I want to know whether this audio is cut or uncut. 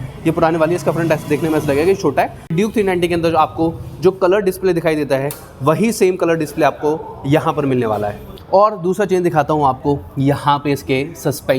cut